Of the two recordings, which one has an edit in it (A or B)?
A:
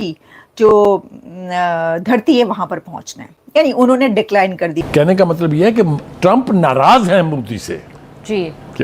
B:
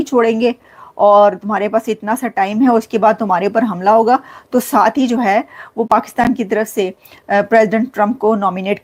A